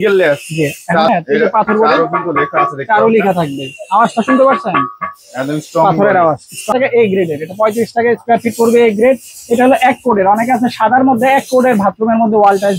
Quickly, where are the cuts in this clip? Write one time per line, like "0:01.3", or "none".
0:01.1
0:06.7